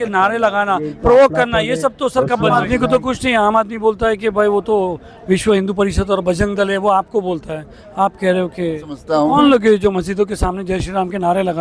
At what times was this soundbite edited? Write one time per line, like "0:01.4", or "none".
0:02.6
0:09.0